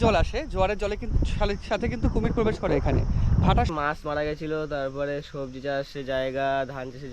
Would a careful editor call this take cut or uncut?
cut